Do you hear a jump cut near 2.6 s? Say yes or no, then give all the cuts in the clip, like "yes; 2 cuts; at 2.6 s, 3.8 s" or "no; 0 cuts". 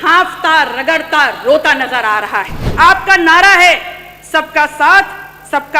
yes; 1 cut; at 2.6 s